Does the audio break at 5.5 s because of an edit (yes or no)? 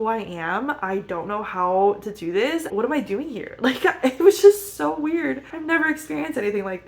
yes